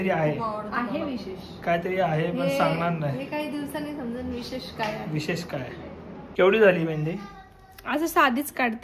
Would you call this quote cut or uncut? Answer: cut